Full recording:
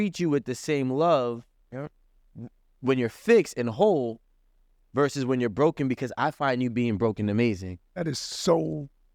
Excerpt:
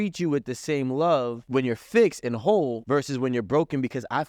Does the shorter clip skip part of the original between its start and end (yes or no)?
yes